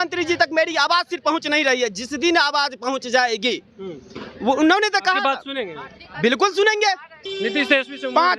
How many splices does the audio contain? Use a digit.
1